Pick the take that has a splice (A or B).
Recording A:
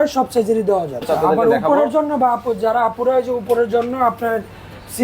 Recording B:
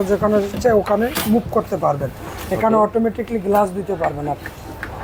A